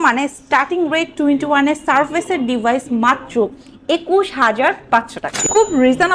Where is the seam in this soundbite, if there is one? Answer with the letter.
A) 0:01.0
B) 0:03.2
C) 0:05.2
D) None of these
C